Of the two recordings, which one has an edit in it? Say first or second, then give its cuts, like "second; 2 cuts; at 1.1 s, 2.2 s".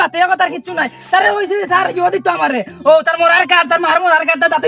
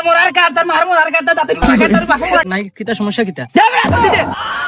second; 1 cut; at 2.4 s